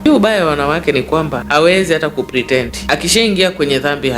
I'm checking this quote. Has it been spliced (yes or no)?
yes